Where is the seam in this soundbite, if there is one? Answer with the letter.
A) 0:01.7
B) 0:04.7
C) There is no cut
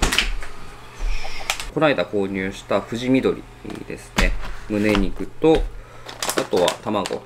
A